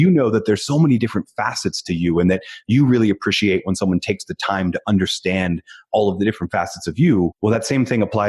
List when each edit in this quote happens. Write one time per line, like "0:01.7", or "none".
0:07.3